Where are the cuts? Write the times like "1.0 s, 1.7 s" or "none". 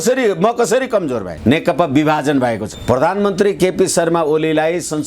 1.3 s, 2.7 s

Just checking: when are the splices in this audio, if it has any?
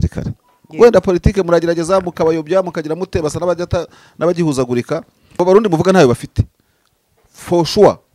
5.4 s

